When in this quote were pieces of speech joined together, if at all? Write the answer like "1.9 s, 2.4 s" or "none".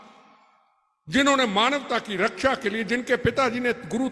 none